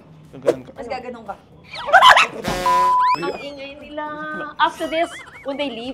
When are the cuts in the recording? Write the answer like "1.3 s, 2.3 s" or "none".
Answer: 2.6 s, 3.2 s